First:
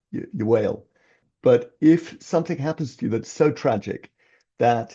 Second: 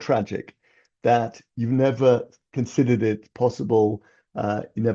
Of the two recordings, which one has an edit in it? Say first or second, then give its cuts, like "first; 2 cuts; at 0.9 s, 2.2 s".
first; 1 cut; at 1.2 s